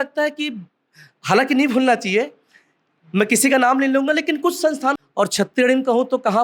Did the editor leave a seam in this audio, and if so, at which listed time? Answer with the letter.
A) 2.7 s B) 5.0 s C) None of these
B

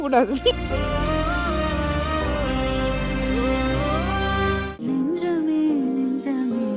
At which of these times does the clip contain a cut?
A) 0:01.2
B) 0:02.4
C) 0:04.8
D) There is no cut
C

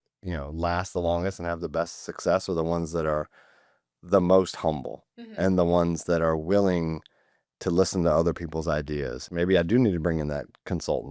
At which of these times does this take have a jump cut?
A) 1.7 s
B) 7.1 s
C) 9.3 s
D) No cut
C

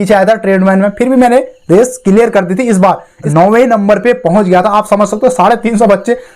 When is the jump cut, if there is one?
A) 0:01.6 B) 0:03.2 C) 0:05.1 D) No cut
B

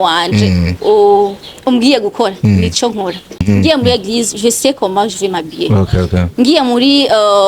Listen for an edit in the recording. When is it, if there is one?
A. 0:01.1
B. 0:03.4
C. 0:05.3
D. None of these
B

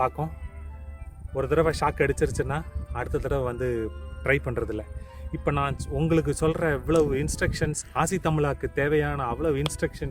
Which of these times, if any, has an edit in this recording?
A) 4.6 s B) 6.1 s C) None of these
C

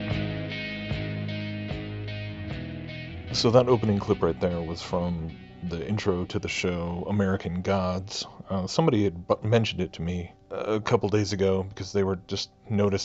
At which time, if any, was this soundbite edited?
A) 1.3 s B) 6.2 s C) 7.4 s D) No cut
B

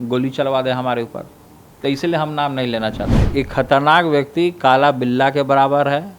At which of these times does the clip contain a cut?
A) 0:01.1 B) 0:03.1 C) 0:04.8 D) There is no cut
B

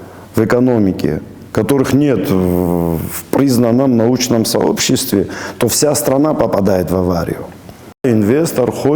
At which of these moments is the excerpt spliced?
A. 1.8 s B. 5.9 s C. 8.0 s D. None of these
C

